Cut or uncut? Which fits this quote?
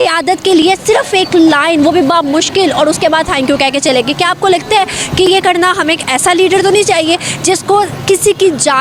uncut